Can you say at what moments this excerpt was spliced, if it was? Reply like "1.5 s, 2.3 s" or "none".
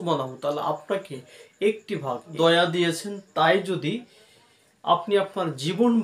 2.3 s